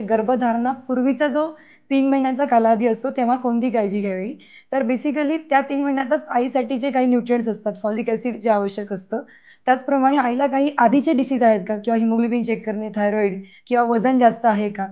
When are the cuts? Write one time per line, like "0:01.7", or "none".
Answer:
none